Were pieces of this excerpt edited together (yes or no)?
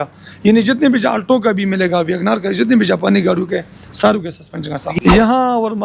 yes